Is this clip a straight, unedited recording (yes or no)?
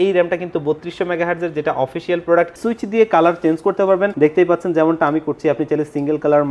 no